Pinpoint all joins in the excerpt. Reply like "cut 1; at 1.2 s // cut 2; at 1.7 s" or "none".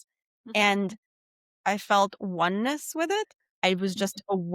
cut 1; at 1.4 s // cut 2; at 3.6 s